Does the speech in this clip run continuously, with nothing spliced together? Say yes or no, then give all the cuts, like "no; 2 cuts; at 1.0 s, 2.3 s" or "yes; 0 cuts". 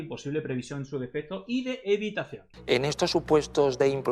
no; 1 cut; at 2.4 s